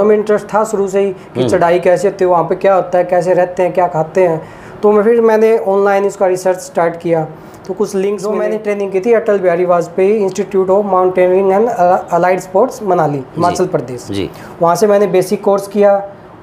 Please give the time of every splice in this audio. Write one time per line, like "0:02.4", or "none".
0:08.4